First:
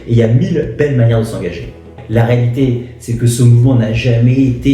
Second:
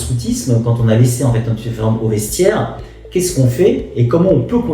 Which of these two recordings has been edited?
first; 1 cut; at 1.9 s

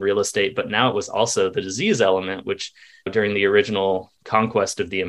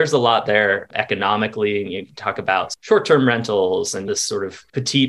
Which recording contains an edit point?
second; 2 cuts; at 2.7 s, 4.2 s

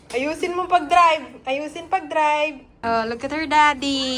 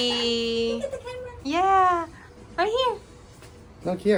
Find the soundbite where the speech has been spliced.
first; 1 cut; at 2.8 s

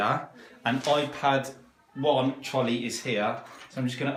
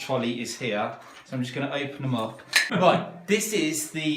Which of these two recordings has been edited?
second; 1 cut; at 2.7 s

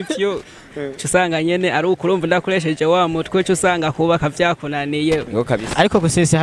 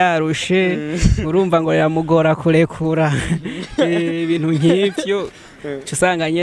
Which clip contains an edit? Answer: first; 1 cut; at 5.3 s

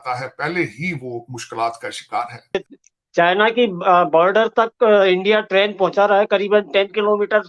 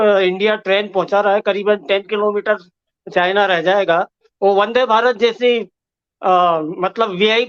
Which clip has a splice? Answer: first; 1 cut; at 2.7 s

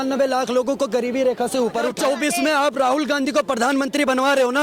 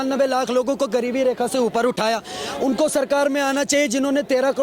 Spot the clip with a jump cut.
first; 1 cut; at 2.0 s

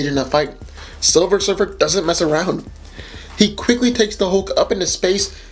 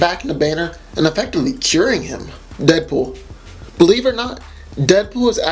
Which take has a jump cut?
second; 1 cut; at 2.9 s

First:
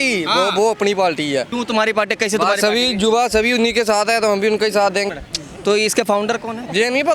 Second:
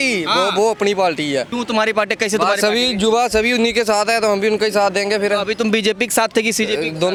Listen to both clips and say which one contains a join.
first; 1 cut; at 5.1 s

